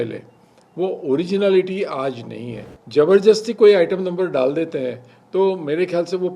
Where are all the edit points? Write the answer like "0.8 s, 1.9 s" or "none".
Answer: 2.7 s